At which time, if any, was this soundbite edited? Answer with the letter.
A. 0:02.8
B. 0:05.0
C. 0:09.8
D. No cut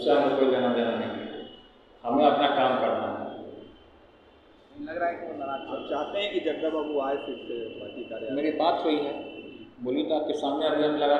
D